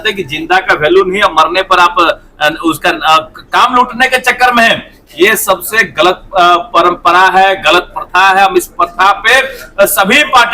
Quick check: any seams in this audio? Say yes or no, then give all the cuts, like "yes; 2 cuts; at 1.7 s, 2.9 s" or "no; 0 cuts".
no; 0 cuts